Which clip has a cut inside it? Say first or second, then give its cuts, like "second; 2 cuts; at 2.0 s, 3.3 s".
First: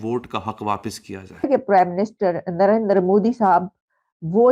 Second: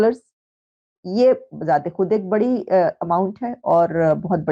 first; 1 cut; at 1.5 s